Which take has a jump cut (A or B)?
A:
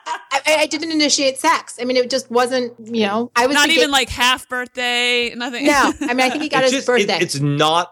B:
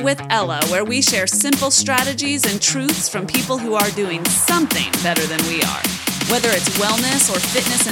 A